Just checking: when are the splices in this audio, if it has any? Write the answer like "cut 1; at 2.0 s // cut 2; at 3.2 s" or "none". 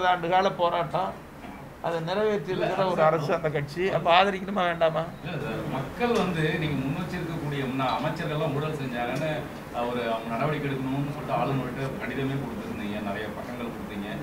none